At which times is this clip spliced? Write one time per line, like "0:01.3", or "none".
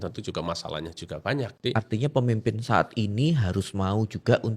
0:01.5

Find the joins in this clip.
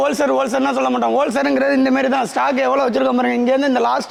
none

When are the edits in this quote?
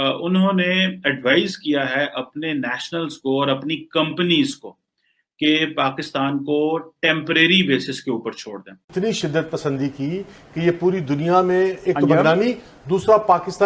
0:08.8

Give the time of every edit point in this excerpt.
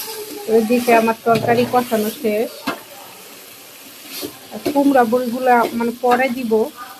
none

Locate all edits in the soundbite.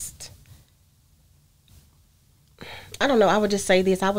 none

